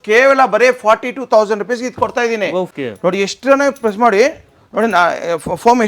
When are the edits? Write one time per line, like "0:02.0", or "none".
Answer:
0:02.7